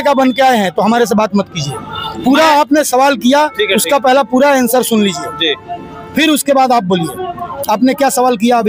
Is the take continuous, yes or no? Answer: yes